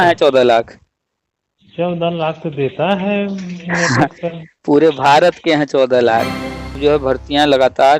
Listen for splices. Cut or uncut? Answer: cut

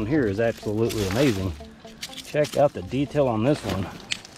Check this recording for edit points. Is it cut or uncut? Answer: uncut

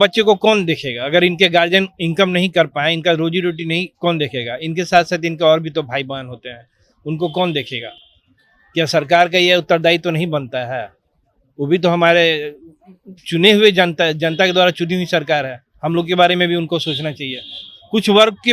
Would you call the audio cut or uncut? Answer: uncut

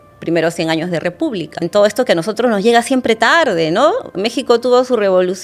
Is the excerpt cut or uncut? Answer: cut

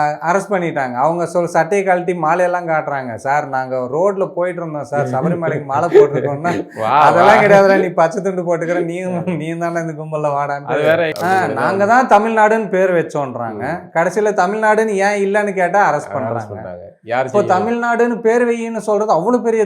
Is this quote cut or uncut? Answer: cut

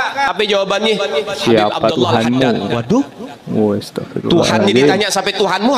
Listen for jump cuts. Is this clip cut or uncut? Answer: uncut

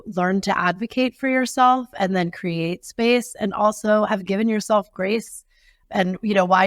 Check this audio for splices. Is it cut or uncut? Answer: uncut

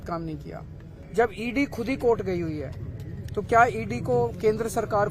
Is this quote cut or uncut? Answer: cut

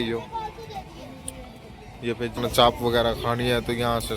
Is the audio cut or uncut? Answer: cut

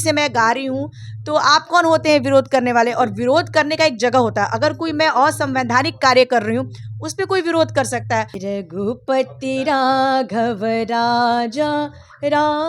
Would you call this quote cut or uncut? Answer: cut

